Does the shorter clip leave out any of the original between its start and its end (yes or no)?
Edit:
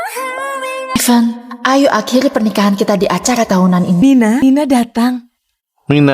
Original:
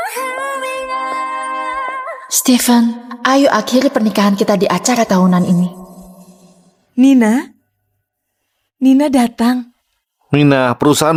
yes